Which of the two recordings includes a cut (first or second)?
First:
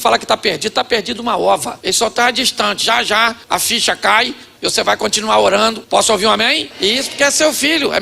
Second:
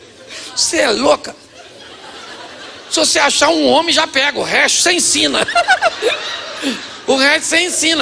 first